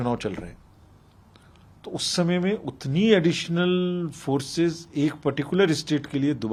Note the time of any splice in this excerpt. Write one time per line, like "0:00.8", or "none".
none